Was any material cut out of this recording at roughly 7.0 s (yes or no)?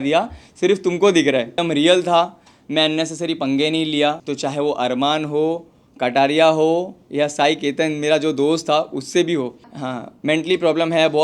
no